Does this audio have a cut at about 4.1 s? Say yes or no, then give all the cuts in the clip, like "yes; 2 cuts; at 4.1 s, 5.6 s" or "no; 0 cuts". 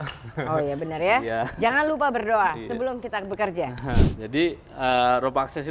yes; 1 cut; at 4.1 s